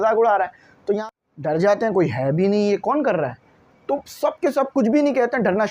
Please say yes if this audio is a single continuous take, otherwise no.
no